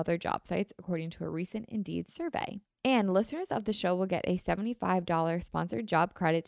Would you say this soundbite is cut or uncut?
cut